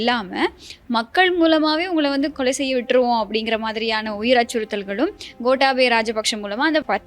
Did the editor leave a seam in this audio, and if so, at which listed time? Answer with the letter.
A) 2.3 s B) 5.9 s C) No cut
A